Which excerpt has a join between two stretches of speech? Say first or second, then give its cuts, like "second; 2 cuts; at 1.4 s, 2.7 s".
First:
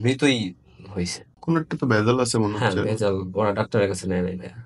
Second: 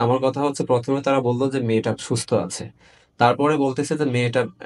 first; 1 cut; at 1.3 s